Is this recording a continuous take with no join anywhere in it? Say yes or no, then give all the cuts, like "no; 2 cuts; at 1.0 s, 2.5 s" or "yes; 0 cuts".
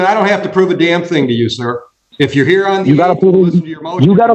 yes; 0 cuts